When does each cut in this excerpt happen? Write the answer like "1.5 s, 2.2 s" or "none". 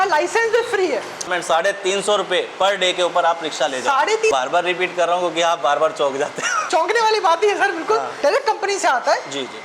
1.3 s, 4.3 s, 6.5 s, 8.1 s